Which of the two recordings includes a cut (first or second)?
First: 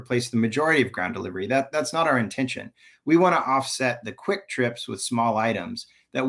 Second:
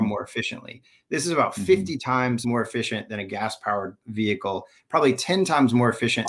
second